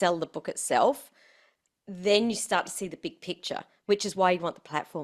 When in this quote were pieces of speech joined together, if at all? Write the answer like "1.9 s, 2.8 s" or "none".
none